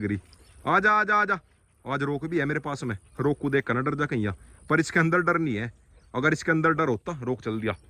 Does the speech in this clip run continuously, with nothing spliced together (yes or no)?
yes